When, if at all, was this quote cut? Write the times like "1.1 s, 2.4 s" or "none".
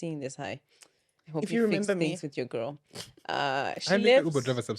none

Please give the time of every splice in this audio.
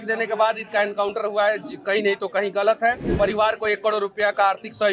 3.0 s

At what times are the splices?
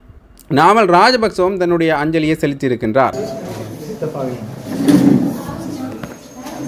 3.1 s

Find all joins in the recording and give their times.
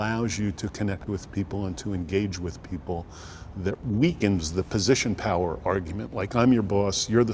none

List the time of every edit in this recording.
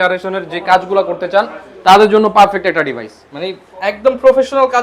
none

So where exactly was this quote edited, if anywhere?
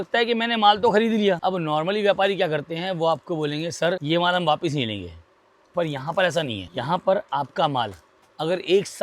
1.4 s, 4.0 s, 6.6 s

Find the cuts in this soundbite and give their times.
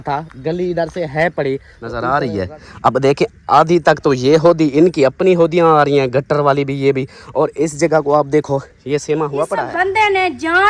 2.0 s, 9.6 s

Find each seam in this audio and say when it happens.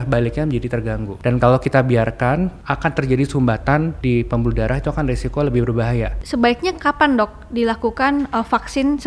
1.1 s, 2.6 s, 4.0 s, 6.2 s

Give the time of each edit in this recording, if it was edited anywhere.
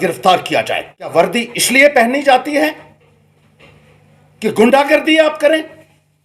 1.1 s

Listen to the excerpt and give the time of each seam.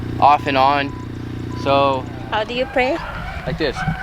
2.2 s

